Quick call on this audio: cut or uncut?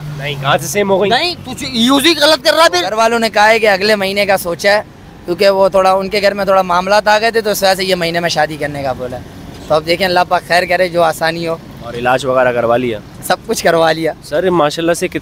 cut